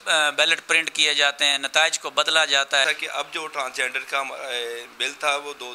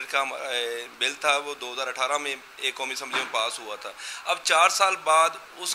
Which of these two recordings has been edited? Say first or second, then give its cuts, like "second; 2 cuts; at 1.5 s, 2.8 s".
first; 1 cut; at 2.8 s